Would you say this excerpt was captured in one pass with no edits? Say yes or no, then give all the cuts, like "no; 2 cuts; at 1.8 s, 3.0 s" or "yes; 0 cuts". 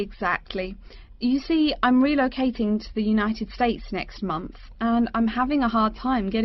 yes; 0 cuts